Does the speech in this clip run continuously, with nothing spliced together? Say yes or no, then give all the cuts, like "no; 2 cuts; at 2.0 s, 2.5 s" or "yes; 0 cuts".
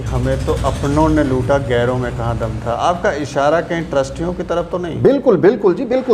yes; 0 cuts